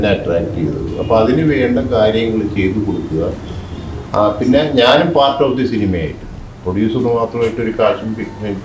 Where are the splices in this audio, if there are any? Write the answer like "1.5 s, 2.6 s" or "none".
none